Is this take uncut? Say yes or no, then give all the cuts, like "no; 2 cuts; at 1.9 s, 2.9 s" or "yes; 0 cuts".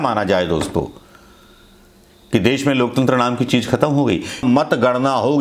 no; 1 cut; at 4.4 s